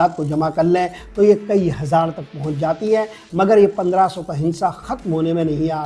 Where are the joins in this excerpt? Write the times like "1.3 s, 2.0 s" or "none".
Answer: none